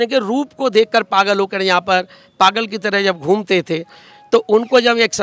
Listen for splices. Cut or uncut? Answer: uncut